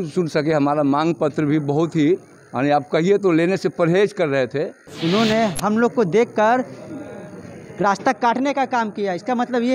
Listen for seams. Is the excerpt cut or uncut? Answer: cut